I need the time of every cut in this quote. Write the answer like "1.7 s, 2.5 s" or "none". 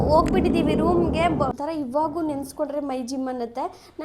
1.5 s